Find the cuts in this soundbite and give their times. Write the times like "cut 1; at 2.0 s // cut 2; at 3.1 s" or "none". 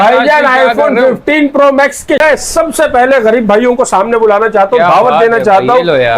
cut 1; at 2.2 s